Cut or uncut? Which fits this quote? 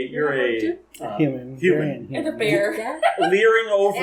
uncut